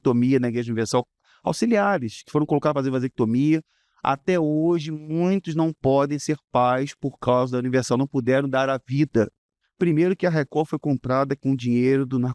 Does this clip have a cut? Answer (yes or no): yes